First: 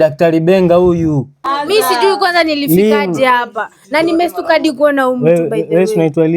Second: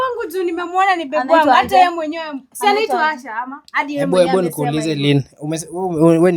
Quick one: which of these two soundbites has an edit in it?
first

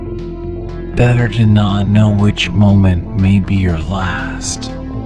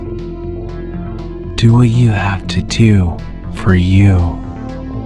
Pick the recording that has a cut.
second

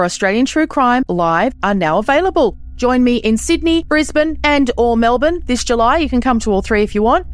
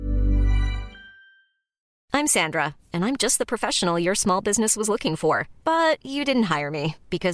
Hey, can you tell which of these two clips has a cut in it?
second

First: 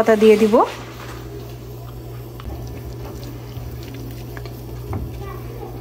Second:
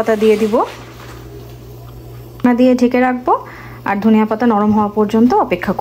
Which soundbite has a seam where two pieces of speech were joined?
second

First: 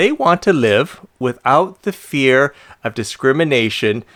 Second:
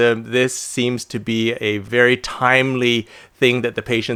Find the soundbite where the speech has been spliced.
second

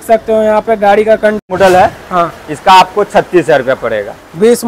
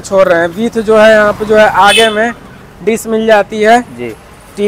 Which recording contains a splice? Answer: first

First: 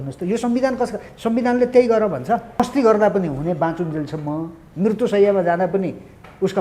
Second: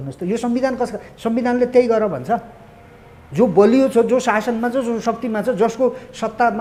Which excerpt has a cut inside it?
first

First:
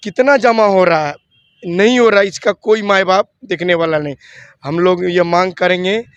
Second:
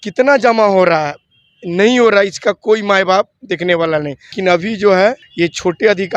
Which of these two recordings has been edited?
second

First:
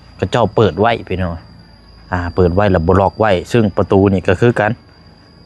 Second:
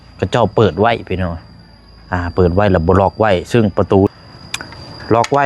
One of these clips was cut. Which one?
second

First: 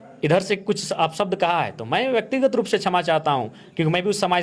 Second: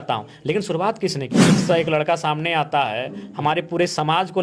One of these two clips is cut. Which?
second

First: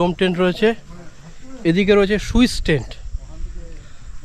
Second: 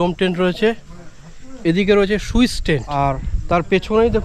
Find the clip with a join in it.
second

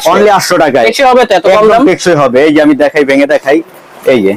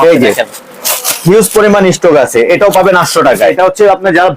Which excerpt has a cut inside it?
second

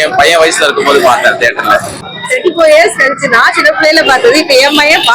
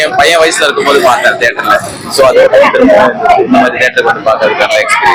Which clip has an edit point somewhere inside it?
first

